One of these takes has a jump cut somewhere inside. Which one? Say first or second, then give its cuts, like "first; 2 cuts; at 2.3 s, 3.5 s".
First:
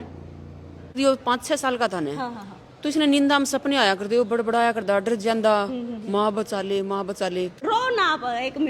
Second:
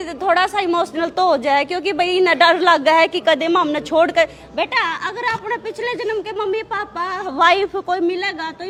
first; 2 cuts; at 1.0 s, 7.6 s